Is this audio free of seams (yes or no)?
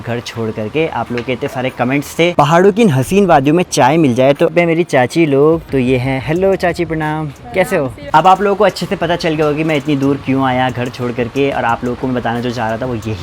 no